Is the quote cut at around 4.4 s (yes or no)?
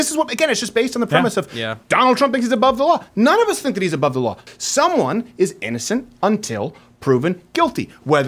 yes